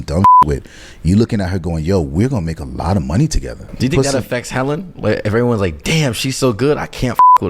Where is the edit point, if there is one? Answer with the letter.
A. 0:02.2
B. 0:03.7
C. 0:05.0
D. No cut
B